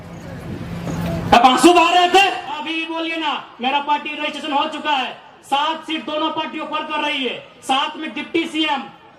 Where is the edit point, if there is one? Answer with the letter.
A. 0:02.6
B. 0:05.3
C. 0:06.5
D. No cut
A